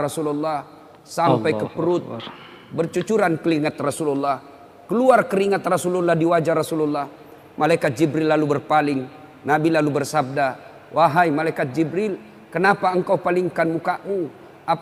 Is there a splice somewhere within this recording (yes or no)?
no